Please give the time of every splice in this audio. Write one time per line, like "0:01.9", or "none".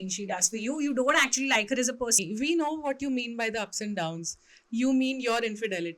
0:02.2